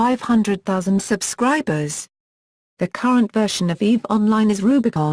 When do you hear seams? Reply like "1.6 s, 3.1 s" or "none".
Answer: 2.4 s

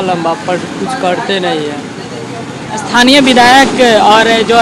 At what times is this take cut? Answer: none

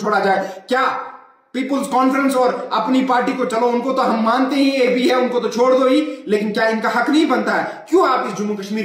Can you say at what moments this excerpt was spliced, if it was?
none

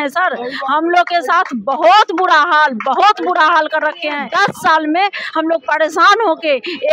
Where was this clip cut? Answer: 4.2 s

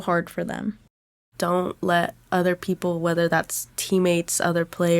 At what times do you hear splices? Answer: 1.2 s

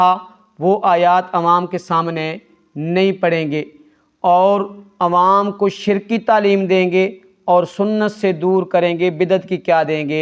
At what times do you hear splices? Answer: none

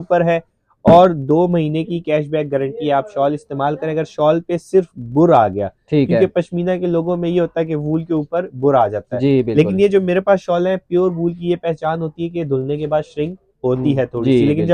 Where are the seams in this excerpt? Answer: none

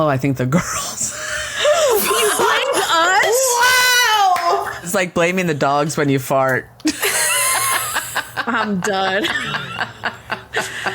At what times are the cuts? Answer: 4.9 s

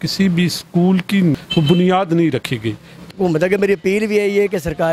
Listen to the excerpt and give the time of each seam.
1.3 s, 3.1 s

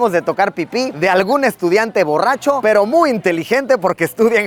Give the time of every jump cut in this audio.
none

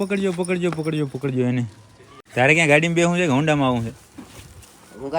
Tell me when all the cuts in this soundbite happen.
2.2 s

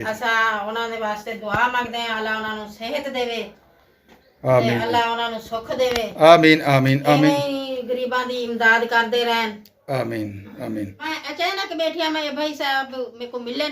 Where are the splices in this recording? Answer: 11.2 s

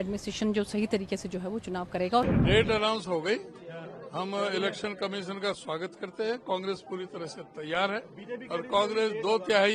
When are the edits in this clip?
2.3 s

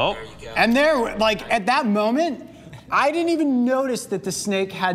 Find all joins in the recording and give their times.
none

